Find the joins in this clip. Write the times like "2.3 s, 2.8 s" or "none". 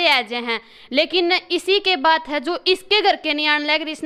none